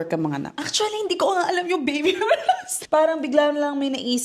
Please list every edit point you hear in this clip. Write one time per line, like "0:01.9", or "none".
0:02.7